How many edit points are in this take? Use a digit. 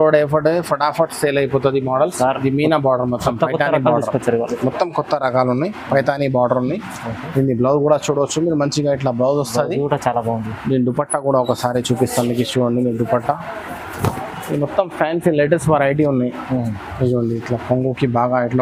0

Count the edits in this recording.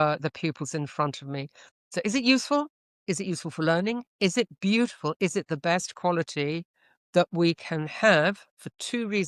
0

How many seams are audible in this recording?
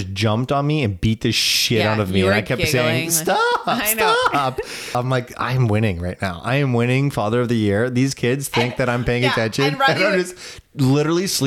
1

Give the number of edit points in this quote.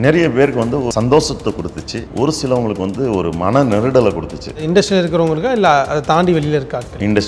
3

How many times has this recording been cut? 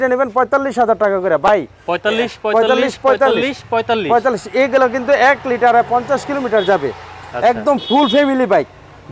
0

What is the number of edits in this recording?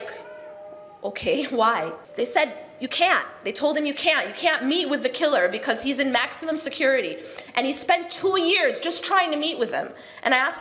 1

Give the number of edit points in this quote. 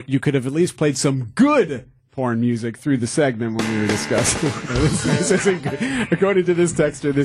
0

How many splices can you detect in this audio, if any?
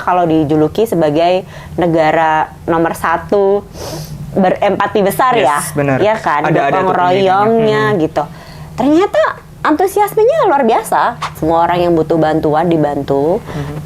1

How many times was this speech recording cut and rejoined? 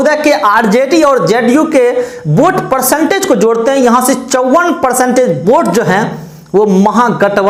0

